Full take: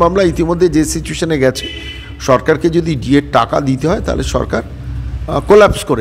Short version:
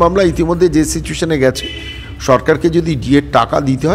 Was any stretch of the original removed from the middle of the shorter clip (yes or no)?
no